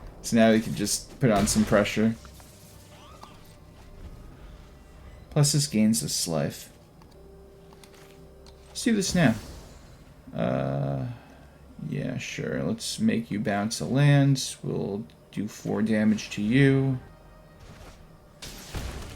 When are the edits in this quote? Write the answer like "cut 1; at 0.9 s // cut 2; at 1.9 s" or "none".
cut 1; at 7.2 s // cut 2; at 17.1 s